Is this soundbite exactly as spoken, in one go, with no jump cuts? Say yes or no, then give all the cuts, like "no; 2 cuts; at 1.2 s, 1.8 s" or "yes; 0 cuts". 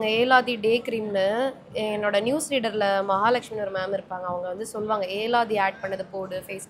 yes; 0 cuts